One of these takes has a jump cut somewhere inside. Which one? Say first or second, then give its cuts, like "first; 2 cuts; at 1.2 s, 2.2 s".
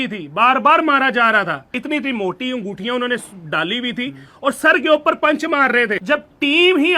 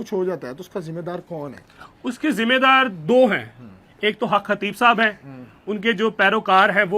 first; 2 cuts; at 1.7 s, 6.0 s